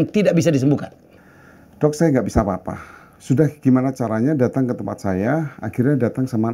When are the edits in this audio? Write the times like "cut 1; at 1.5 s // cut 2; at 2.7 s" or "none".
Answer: cut 1; at 1.0 s